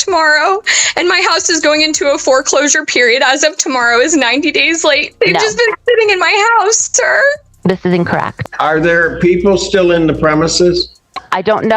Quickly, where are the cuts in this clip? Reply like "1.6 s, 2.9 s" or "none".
5.1 s, 8.3 s

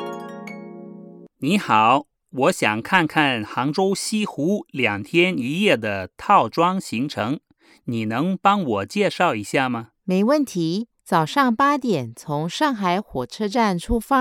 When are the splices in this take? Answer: 9.9 s

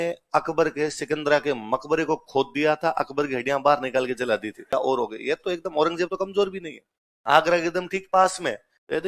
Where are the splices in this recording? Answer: 4.7 s

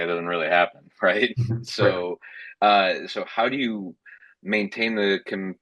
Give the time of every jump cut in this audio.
none

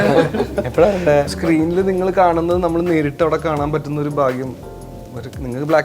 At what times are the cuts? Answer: 1.3 s

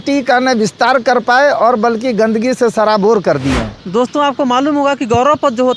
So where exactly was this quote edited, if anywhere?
3.7 s

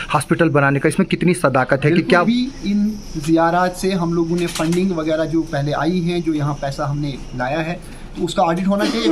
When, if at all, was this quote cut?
2.3 s

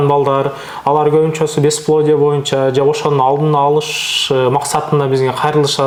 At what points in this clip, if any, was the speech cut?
none

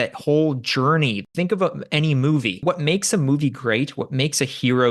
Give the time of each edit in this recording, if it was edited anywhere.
1.2 s, 2.6 s

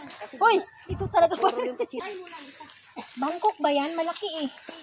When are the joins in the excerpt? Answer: 2.0 s

